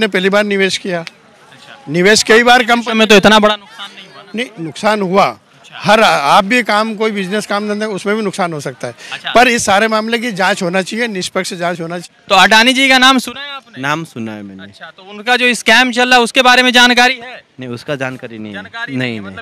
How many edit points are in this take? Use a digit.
1